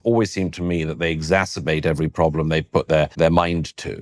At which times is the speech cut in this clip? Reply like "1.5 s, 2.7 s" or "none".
3.1 s